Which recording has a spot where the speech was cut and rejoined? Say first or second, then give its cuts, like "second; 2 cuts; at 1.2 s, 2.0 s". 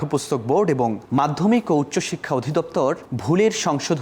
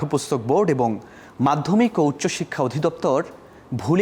first; 2 cuts; at 1.0 s, 3.1 s